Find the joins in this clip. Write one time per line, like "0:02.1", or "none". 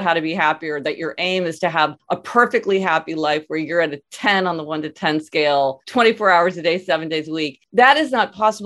0:02.0
0:05.8
0:07.6